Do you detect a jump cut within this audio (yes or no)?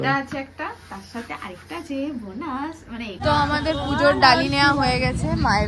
yes